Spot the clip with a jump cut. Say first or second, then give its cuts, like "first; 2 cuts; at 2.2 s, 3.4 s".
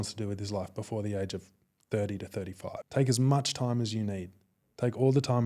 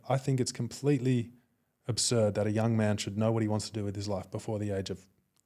first; 1 cut; at 2.8 s